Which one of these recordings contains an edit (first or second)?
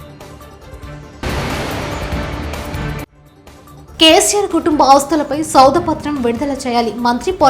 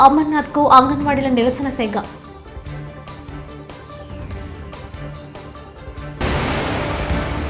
first